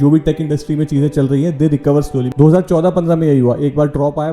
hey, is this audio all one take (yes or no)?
no